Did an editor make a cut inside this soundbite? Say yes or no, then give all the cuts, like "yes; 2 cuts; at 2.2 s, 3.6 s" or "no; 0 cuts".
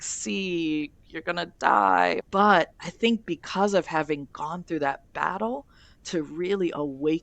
yes; 1 cut; at 2.2 s